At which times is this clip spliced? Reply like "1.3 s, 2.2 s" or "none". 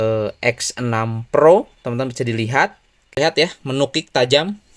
3.1 s